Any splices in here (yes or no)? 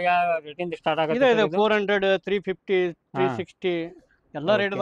no